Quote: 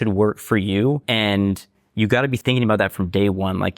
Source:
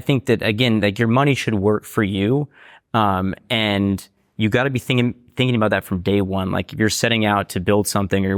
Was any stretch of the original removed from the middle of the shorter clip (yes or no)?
yes